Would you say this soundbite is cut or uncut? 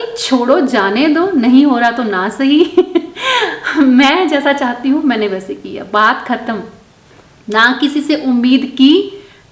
uncut